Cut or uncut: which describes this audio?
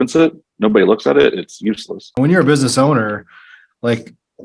cut